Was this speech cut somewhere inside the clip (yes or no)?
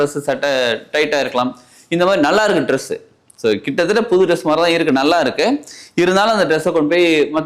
no